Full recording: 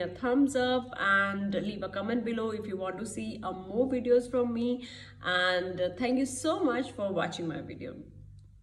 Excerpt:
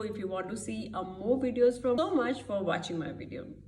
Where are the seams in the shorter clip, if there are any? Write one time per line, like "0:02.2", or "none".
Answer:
0:02.0